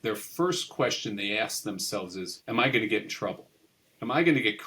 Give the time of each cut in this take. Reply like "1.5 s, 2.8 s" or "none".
2.4 s